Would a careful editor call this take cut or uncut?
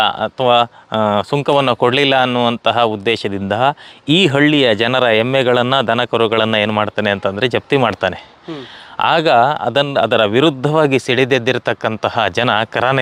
uncut